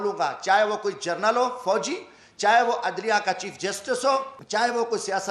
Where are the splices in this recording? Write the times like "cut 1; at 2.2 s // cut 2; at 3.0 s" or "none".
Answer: cut 1; at 4.4 s